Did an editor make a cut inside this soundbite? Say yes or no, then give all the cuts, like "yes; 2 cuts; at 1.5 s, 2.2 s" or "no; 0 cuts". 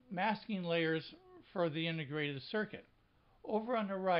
yes; 1 cut; at 0.9 s